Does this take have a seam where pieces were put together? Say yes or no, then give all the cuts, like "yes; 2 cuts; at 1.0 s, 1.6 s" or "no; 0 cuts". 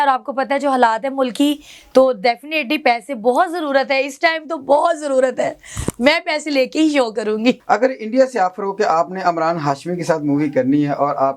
yes; 1 cut; at 7.6 s